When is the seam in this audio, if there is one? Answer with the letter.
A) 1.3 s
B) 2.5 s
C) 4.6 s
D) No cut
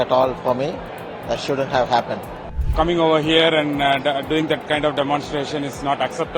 B